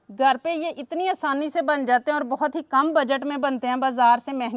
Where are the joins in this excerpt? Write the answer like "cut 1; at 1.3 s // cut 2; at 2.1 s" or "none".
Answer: none